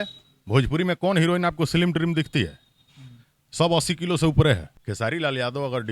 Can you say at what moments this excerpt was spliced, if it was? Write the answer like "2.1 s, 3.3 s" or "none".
4.8 s